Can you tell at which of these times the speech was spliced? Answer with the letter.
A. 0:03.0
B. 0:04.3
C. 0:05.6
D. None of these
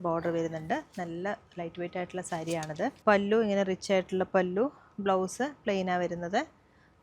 A